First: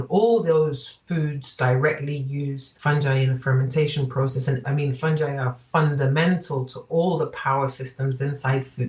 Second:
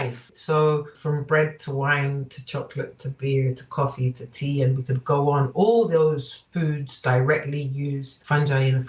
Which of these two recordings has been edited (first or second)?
first